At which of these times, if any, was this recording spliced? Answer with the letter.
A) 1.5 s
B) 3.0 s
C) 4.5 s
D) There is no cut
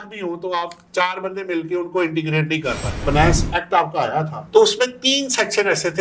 B